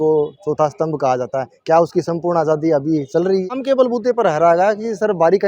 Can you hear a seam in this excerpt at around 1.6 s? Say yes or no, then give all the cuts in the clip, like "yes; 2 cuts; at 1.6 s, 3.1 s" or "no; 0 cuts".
no; 1 cut; at 3.5 s